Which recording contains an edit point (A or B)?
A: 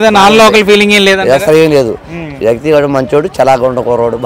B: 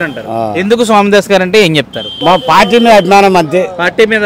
B